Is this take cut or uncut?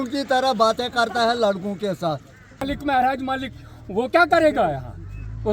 cut